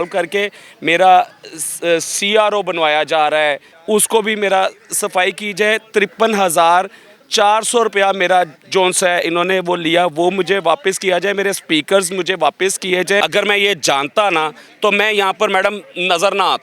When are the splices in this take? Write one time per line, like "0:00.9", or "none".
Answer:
0:03.7
0:13.2